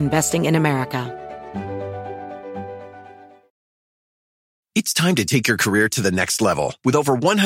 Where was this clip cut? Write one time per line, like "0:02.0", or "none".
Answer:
0:01.1